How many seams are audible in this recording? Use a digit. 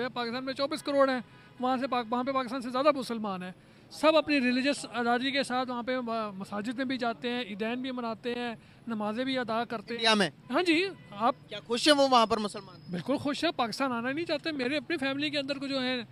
0